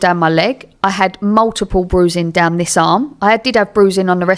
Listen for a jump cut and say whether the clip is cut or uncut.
uncut